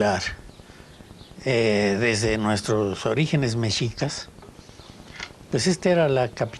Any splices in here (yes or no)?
no